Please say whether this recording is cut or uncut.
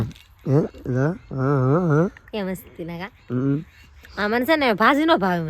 uncut